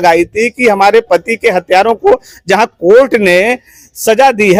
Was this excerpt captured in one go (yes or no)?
yes